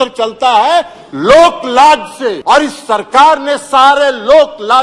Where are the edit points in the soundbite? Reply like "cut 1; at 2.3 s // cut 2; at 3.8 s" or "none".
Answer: cut 1; at 2.4 s